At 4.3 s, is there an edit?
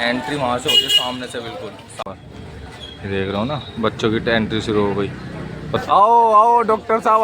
no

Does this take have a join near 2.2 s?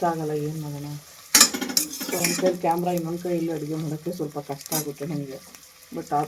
no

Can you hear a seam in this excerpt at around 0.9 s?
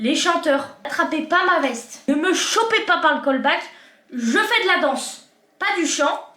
yes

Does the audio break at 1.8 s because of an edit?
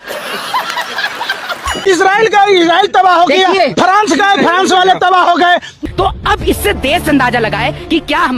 yes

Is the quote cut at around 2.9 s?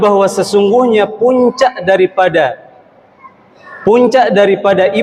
no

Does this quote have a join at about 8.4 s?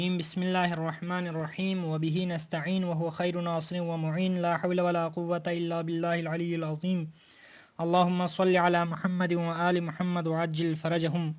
yes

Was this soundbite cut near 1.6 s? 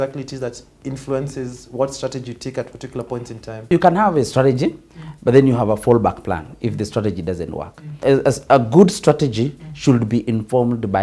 no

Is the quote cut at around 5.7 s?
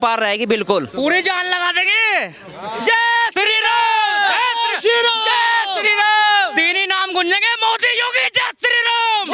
no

